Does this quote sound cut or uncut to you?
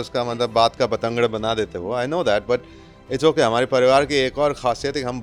uncut